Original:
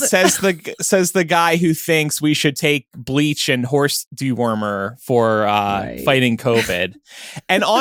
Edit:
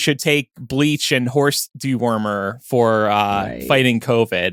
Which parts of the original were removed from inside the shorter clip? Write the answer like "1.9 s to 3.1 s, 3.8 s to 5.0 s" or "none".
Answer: none